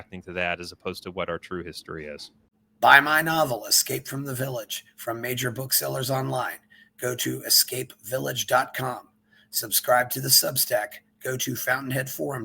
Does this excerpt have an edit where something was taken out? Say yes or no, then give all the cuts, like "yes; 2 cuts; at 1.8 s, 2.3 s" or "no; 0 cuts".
yes; 1 cut; at 2.6 s